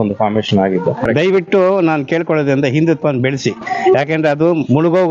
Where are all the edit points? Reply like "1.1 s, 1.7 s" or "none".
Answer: 1.1 s